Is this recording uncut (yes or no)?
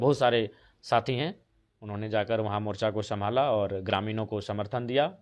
yes